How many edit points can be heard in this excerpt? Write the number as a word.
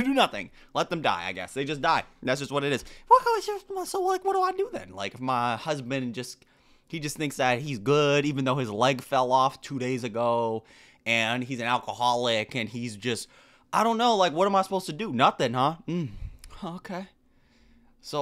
one